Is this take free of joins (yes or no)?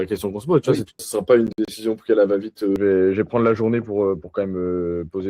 no